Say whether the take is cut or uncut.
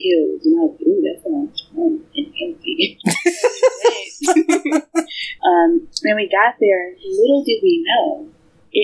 cut